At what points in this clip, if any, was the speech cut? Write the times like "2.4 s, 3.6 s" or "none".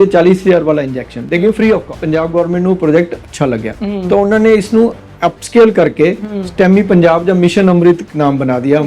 2.0 s